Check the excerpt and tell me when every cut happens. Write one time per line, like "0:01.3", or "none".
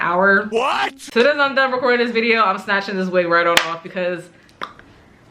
0:01.1